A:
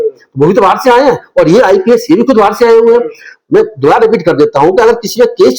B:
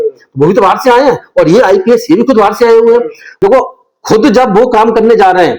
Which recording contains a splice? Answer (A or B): B